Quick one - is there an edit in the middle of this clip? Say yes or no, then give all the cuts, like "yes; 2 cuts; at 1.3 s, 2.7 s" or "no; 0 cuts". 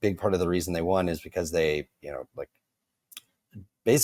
no; 0 cuts